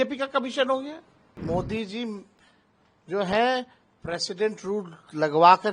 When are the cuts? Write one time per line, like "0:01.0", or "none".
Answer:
0:01.3